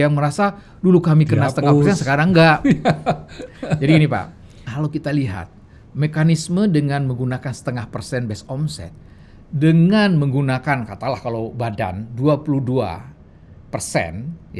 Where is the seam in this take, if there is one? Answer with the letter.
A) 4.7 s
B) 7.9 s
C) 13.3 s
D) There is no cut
A